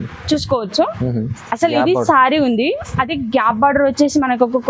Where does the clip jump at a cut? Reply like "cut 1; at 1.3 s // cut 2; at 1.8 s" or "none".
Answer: none